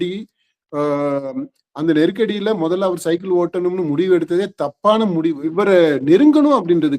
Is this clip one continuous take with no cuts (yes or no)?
no